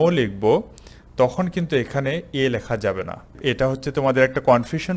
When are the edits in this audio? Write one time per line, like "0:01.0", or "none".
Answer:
0:03.4